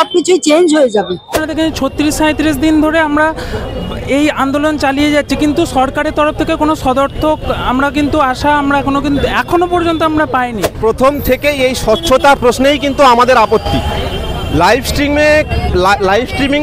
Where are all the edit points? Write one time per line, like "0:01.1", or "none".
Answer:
0:01.3
0:10.6